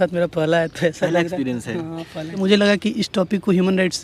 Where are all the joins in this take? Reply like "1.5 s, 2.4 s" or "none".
2.3 s